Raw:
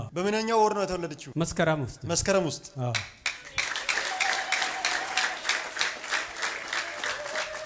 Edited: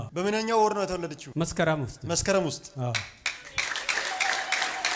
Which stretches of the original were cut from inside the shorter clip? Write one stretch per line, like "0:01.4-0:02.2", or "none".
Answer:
none